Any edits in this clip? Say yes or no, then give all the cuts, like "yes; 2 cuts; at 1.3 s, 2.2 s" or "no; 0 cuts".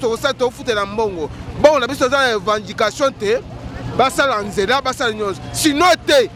no; 0 cuts